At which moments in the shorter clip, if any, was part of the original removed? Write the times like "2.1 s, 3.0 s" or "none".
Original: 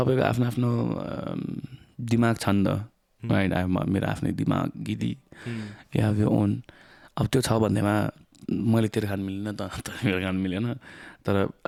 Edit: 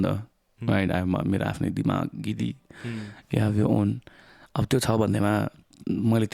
none